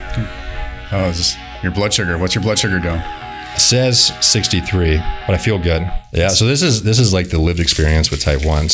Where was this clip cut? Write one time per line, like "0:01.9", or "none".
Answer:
0:06.0